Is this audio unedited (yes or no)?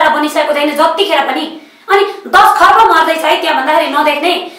yes